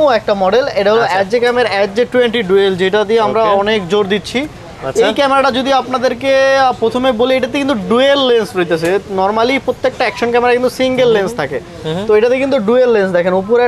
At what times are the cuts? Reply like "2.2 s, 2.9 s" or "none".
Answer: none